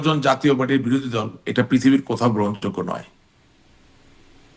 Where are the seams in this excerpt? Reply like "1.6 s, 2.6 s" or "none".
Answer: none